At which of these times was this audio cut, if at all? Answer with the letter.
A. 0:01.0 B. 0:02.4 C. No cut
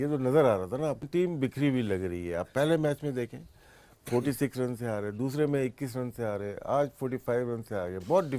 A